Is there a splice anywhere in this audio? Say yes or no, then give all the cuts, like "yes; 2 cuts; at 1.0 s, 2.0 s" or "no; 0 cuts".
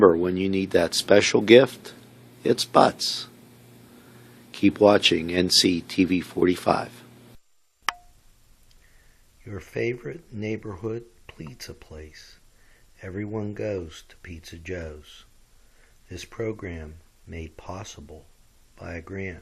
yes; 1 cut; at 7.3 s